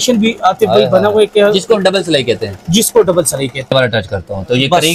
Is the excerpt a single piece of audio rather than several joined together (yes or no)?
no